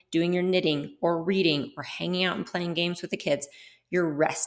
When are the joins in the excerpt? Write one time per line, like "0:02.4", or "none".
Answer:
none